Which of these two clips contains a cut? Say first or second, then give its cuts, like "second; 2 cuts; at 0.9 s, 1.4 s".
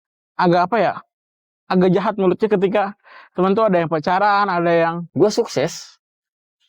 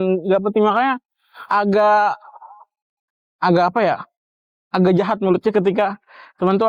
first; 1 cut; at 5.0 s